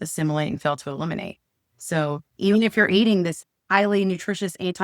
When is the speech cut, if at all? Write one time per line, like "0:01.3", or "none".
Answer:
0:02.3
0:03.4